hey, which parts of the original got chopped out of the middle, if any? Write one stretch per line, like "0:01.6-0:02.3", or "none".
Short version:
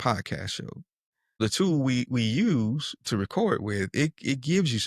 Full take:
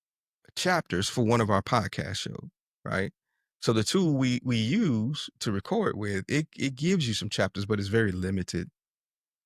0:03.1-0:03.7

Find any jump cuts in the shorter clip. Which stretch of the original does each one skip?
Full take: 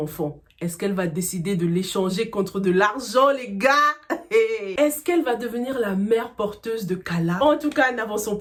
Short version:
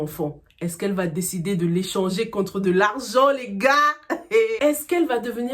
0:04.6-0:04.7

